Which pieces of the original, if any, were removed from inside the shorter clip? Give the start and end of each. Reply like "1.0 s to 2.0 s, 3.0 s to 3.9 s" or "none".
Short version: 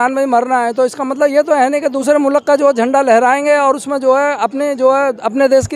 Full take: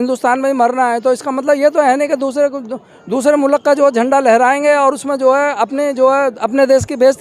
2.3 s to 3.2 s